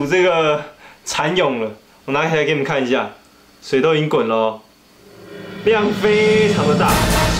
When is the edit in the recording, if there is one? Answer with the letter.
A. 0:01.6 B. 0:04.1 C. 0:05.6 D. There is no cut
D